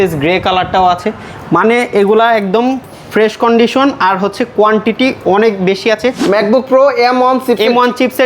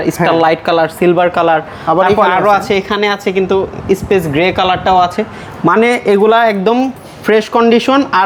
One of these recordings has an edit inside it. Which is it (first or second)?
first